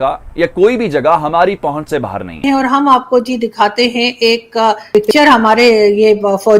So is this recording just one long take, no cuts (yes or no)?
no